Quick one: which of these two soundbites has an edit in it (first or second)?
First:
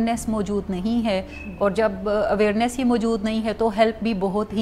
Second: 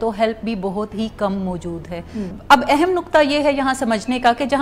second